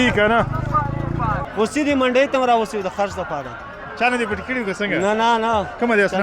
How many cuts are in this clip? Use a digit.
1